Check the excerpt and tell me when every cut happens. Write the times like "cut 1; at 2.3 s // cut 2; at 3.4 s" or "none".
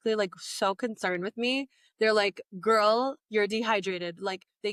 none